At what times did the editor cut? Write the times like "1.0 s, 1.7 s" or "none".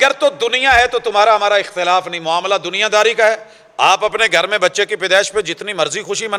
none